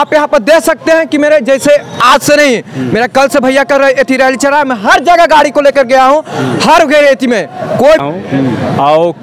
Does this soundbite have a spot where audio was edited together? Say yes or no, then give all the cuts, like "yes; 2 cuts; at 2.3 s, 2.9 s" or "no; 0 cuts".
yes; 1 cut; at 8.0 s